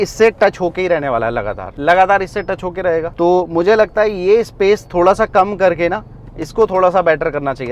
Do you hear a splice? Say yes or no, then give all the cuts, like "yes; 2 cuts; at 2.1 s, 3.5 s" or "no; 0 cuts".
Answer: no; 0 cuts